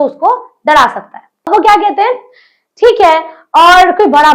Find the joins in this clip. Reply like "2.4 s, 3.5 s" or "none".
1.5 s